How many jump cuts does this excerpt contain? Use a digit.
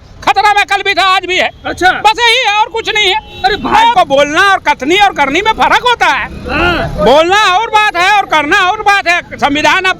1